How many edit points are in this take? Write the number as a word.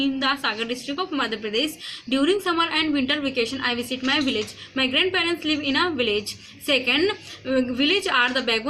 zero